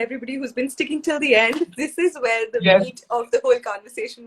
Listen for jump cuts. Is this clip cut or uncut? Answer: uncut